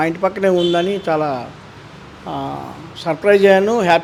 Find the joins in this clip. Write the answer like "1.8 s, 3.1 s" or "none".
none